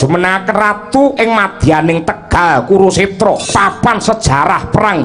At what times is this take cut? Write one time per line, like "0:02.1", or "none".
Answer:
0:03.4